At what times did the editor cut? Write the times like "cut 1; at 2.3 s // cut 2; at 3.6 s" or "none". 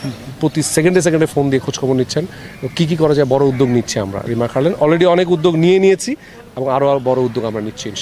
none